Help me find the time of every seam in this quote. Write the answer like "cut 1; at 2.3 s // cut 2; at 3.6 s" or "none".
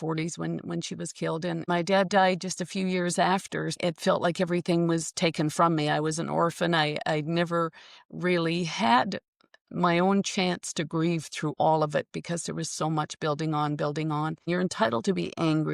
cut 1; at 1.6 s // cut 2; at 3.8 s // cut 3; at 14.5 s